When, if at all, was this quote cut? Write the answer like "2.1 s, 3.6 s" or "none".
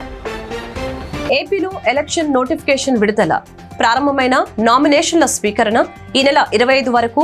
1.3 s